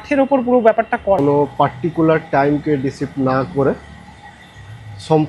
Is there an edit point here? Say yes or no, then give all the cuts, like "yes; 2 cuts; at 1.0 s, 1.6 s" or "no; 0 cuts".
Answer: yes; 1 cut; at 1.2 s